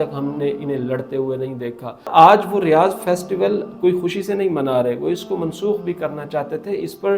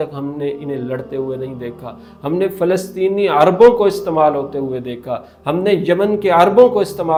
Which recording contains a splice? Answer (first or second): first